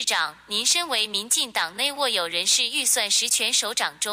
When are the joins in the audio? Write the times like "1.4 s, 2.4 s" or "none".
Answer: none